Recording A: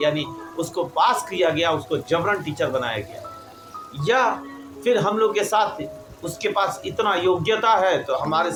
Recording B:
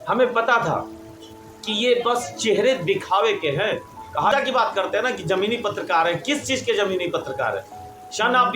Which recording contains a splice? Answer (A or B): B